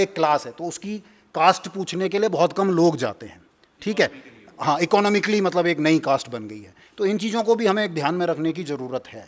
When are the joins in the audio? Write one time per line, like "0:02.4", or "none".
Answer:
none